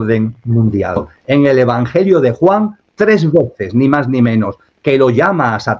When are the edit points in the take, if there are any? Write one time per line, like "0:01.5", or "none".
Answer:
0:01.2